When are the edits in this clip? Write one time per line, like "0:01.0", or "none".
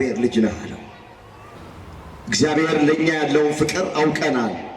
0:01.5